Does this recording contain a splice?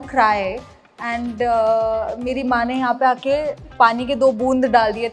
no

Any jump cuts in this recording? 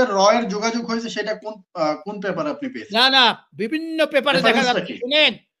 no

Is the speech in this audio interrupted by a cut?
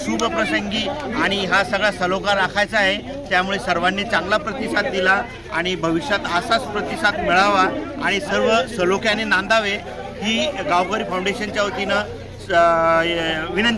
no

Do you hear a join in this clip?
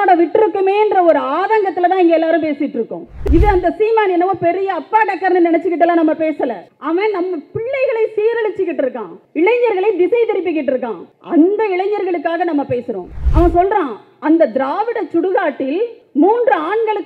yes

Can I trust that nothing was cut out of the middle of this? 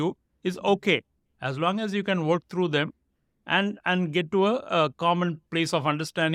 yes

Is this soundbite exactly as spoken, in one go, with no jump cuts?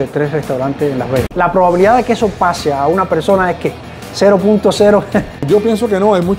no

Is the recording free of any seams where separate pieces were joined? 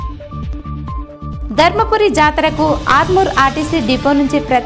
no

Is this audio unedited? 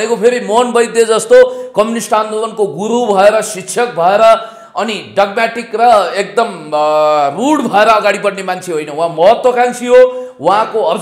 yes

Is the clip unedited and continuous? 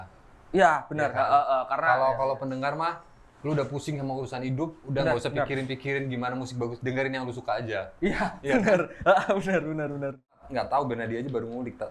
no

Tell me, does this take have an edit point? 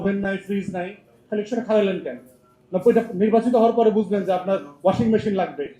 no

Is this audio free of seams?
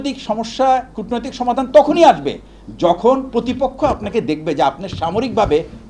yes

